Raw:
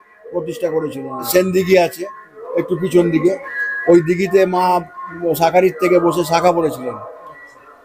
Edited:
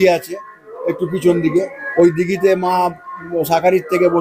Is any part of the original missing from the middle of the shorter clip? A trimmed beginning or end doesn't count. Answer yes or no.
yes